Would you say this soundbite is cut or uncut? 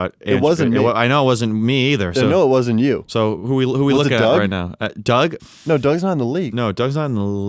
uncut